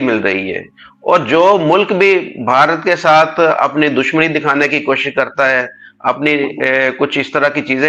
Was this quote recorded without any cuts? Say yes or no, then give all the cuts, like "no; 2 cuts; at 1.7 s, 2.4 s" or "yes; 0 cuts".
yes; 0 cuts